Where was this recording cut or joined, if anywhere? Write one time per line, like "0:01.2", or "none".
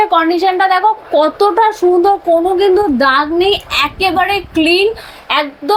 none